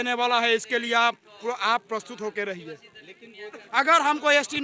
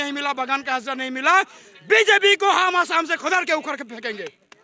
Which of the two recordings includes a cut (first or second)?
first